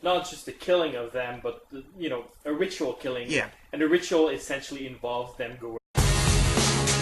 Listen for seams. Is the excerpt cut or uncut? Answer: uncut